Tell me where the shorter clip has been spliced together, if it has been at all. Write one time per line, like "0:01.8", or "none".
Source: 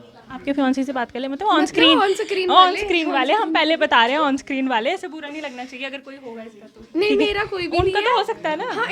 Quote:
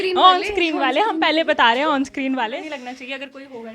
0:02.5